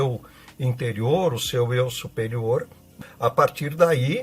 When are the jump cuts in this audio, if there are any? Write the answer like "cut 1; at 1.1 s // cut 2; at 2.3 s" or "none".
cut 1; at 2.8 s